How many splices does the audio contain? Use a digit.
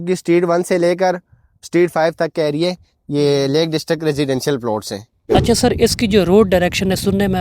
1